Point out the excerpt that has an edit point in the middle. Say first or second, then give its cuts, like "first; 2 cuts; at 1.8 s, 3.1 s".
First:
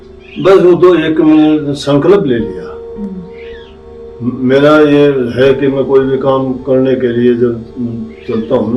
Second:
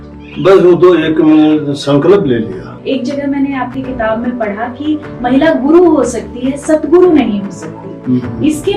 second; 1 cut; at 2.7 s